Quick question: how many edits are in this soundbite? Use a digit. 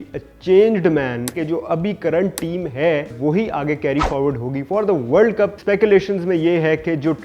3